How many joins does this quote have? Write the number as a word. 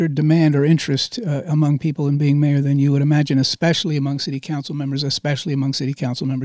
zero